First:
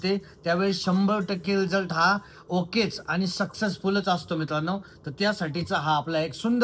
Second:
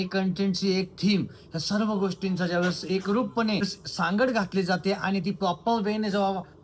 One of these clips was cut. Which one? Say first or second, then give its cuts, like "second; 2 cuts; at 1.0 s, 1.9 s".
second; 1 cut; at 3.6 s